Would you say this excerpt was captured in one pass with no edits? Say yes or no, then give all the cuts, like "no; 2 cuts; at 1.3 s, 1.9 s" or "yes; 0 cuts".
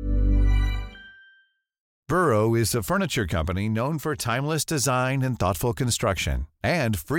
no; 1 cut; at 2.0 s